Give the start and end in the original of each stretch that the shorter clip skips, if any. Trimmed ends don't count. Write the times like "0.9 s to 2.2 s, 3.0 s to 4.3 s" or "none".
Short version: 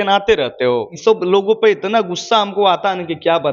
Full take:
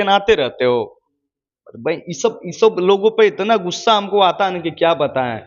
0.9 s to 2.5 s